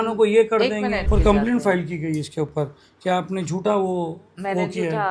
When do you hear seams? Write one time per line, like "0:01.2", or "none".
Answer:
0:01.1